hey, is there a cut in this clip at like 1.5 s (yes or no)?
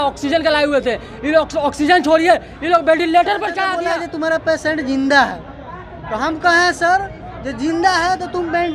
no